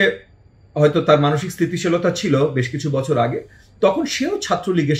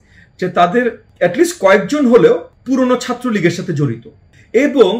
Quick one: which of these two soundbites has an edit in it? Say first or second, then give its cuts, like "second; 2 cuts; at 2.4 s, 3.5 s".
second; 2 cuts; at 1.1 s, 2.5 s